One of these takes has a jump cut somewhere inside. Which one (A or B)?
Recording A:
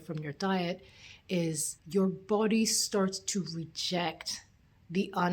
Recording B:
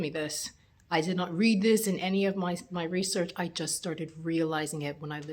A